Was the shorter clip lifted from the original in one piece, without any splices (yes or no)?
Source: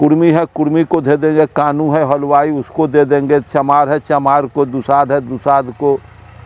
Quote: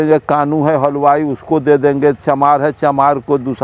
yes